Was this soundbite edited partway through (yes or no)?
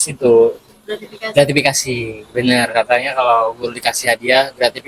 no